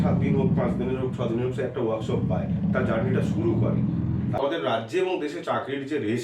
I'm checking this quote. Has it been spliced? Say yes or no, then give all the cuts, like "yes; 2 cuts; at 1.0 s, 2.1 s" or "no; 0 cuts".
yes; 1 cut; at 4.4 s